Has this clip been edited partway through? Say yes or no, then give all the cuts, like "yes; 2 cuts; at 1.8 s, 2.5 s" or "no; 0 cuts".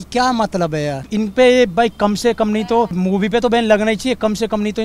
yes; 2 cuts; at 1.0 s, 2.9 s